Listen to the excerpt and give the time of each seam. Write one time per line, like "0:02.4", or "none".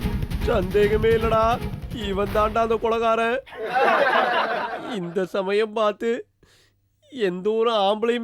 none